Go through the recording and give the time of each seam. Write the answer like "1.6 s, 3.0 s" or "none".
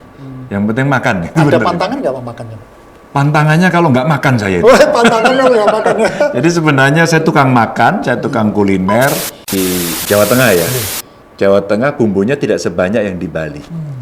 1.5 s, 9.5 s